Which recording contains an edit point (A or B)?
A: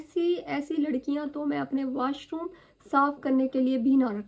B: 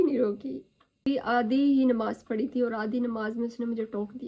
B